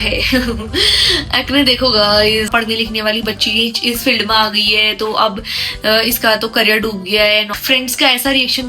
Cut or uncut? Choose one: cut